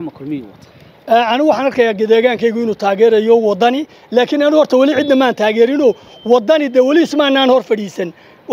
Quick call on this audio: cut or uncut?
uncut